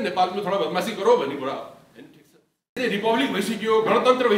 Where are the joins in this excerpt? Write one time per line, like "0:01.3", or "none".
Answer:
0:02.8